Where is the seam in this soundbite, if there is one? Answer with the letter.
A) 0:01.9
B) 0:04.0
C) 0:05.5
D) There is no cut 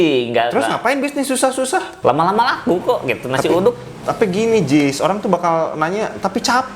A